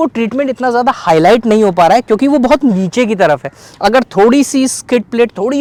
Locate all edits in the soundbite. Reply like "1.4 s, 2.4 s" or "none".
none